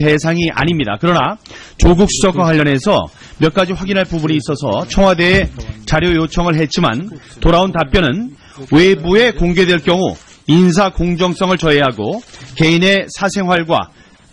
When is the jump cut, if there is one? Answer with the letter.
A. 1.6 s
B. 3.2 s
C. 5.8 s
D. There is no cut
D